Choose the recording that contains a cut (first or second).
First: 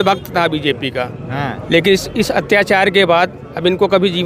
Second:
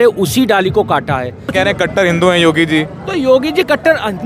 second